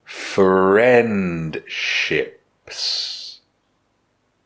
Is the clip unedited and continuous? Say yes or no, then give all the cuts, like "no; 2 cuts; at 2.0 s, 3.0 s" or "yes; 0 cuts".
yes; 0 cuts